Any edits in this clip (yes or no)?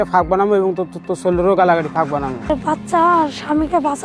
yes